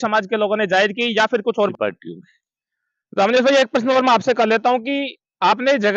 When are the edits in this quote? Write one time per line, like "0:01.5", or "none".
0:01.7